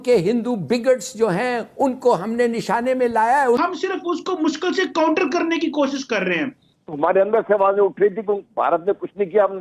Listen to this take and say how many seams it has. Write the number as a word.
two